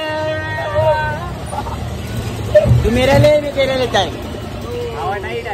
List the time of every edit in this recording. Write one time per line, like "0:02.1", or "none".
none